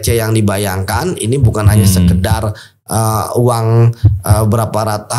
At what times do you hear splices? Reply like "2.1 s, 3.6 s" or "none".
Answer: none